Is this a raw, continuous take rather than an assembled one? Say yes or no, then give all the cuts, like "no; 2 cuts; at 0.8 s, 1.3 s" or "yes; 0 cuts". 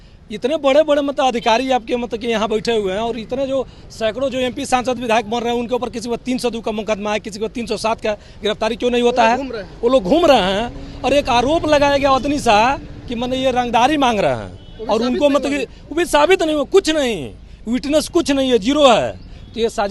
yes; 0 cuts